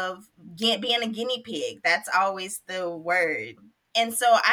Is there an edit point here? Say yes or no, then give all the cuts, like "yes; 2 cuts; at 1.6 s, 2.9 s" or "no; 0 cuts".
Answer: yes; 1 cut; at 3.5 s